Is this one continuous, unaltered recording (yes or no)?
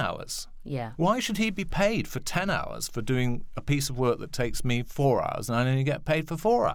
yes